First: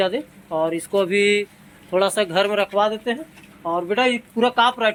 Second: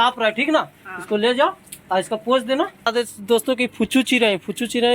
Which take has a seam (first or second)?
second